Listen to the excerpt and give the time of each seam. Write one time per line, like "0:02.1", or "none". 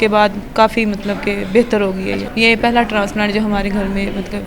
0:02.3